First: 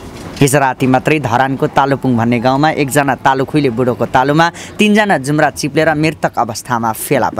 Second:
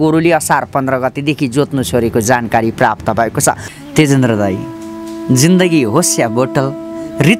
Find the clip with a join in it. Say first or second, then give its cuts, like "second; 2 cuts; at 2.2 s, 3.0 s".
second; 1 cut; at 3.7 s